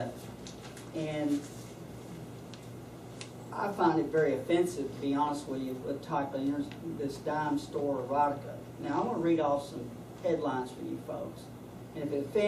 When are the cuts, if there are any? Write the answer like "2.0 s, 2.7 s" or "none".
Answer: 10.9 s